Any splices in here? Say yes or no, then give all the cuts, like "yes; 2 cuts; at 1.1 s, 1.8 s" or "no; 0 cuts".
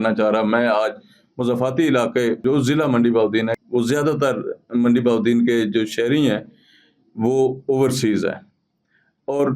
yes; 2 cuts; at 2.4 s, 3.6 s